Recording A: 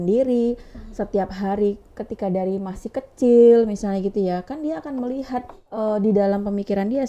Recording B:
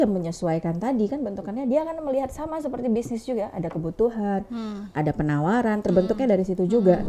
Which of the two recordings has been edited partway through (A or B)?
A